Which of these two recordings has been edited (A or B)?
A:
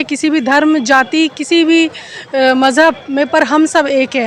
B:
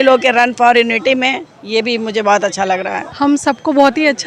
B